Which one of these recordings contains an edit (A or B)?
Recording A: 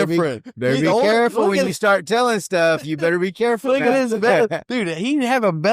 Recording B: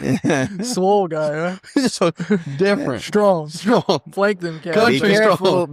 B